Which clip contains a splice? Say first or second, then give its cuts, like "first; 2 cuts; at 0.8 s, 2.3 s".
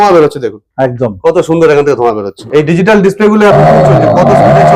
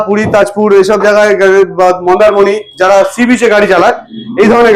first; 1 cut; at 2.3 s